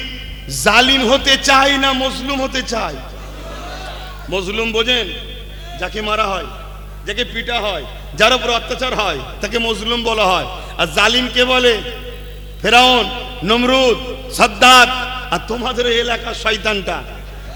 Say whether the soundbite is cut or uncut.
uncut